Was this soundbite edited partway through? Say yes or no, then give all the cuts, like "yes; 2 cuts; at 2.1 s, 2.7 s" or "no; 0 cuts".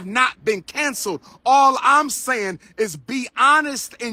no; 0 cuts